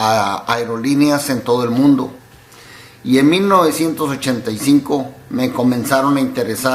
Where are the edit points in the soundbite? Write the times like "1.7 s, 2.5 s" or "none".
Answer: none

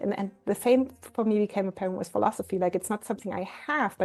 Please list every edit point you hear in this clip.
none

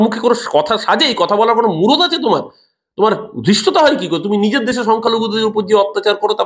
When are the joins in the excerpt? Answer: none

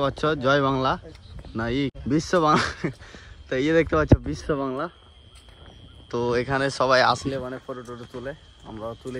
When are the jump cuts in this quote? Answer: none

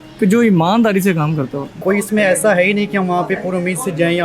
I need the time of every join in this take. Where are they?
1.8 s

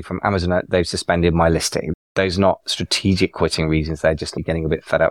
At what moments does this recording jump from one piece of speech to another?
1.9 s

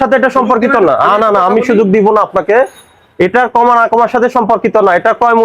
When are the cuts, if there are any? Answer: none

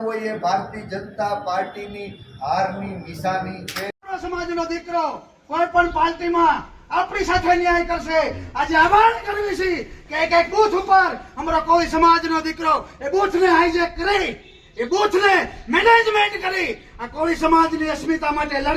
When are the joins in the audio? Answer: 3.8 s

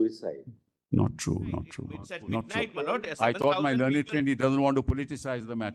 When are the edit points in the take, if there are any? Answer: 2.7 s

